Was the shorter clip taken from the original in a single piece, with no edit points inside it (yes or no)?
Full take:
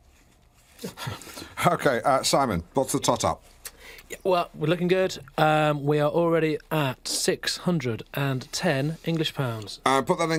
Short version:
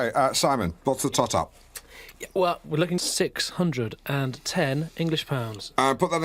no